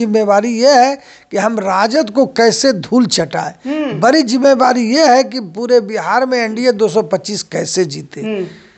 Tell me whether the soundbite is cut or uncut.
uncut